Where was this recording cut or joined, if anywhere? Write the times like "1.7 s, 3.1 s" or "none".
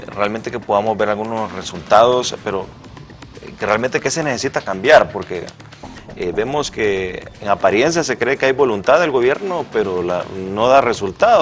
6.9 s